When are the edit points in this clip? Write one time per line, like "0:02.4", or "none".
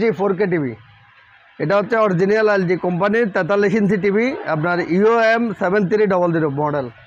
none